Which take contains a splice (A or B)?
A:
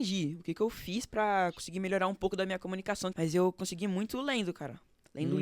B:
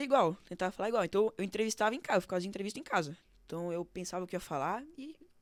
A